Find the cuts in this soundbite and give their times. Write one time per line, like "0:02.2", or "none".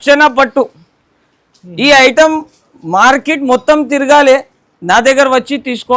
none